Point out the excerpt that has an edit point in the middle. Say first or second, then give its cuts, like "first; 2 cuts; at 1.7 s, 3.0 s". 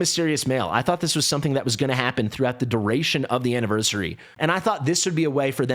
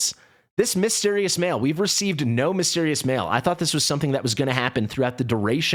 first; 1 cut; at 4.3 s